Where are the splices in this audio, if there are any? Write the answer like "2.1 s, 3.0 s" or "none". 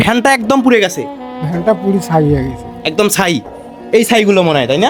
none